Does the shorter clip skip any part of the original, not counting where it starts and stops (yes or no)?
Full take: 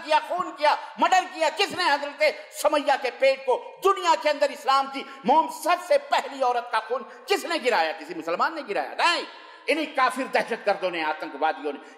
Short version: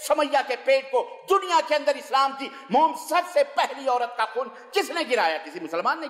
no